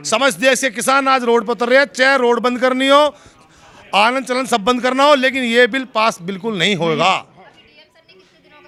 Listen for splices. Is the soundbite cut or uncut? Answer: uncut